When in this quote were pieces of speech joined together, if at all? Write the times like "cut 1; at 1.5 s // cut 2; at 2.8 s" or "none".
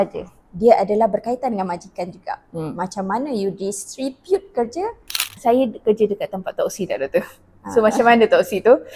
cut 1; at 5.3 s